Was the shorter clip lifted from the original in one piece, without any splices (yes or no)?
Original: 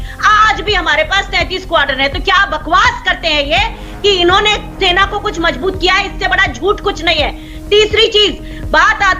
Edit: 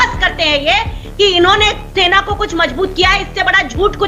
yes